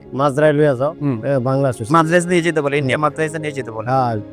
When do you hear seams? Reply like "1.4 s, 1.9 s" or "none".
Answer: none